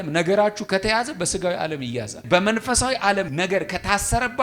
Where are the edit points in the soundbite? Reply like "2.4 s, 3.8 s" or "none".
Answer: 2.2 s, 3.3 s

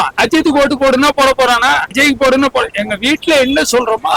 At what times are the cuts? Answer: none

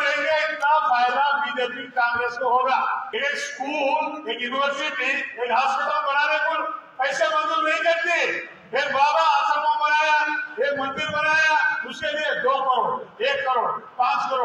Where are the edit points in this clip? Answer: 3.1 s

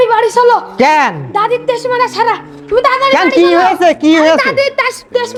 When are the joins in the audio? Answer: none

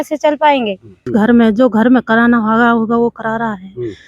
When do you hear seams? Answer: 1.0 s

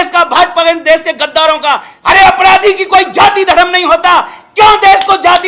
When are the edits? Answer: 1.9 s

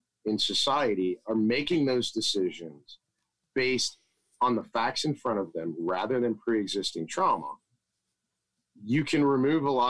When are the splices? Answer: none

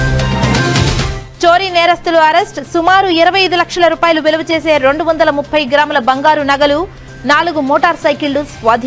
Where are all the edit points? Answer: none

